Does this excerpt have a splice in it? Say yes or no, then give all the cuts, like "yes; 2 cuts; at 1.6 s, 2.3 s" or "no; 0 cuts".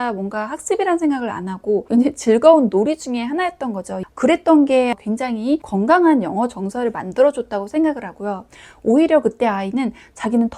yes; 1 cut; at 3.9 s